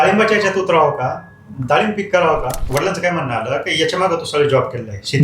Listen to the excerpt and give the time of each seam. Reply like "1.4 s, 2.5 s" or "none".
2.6 s